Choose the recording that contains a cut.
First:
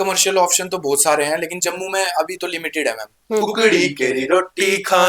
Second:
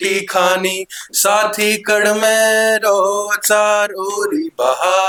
first; 1 cut; at 3.4 s

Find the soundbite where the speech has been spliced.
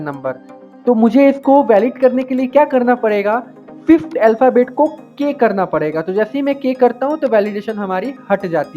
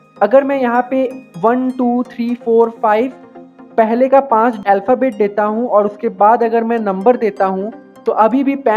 second; 1 cut; at 4.6 s

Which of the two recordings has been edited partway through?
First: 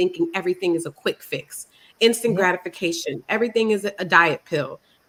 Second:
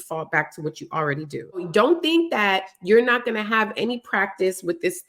second; 1 cut; at 1.7 s

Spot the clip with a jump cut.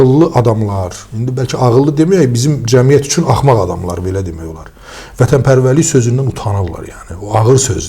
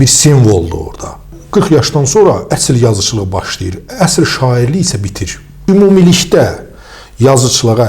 second; 2 cuts; at 1.4 s, 5.5 s

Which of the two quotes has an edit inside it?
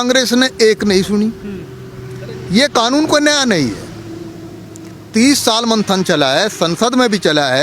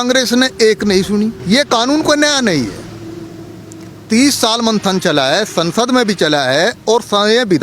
second; 1 cut; at 1.4 s

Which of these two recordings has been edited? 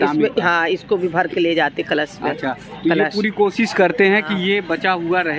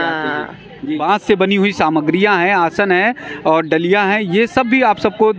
second; 1 cut; at 1.0 s

